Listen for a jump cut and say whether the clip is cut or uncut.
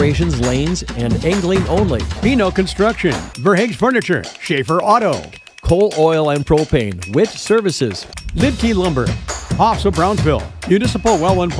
uncut